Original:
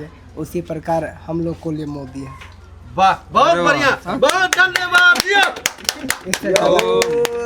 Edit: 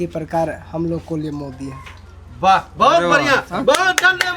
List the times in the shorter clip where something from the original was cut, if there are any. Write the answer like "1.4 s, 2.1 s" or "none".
none